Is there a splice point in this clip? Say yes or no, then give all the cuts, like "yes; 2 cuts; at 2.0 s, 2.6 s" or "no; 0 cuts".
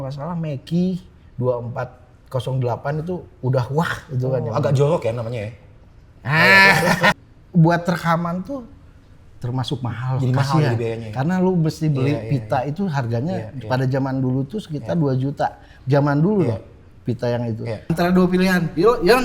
yes; 2 cuts; at 7.1 s, 17.9 s